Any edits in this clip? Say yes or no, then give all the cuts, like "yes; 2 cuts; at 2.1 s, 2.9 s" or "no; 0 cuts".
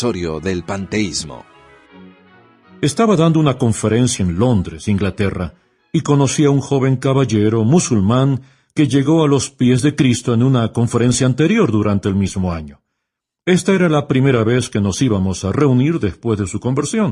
no; 0 cuts